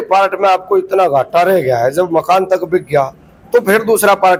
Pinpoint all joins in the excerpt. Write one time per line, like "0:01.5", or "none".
none